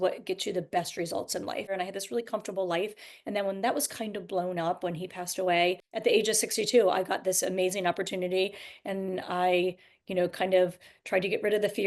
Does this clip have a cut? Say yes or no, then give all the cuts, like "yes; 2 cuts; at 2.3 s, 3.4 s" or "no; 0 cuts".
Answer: yes; 2 cuts; at 1.7 s, 5.9 s